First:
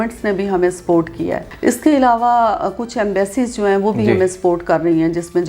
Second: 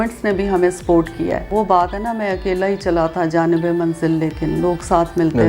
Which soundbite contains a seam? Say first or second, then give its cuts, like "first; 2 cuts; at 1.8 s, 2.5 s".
second; 1 cut; at 1.5 s